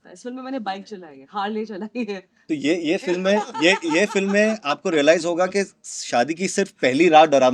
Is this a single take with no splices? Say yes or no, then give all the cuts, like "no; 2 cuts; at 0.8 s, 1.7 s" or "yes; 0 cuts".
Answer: no; 1 cut; at 2.4 s